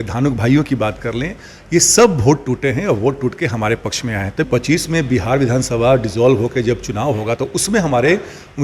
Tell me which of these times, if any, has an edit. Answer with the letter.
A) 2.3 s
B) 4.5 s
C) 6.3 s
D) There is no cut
B